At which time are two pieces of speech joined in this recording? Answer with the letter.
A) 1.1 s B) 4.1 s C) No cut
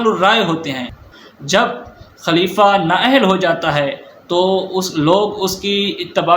A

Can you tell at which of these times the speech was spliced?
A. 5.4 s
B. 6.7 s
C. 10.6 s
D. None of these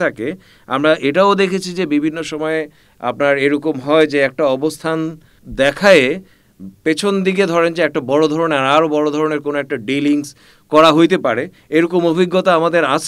A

